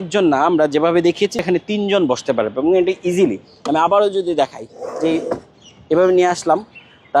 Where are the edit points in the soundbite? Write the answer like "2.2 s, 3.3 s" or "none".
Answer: 1.4 s